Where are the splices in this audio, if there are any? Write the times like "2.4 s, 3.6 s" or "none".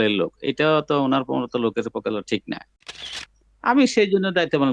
3.0 s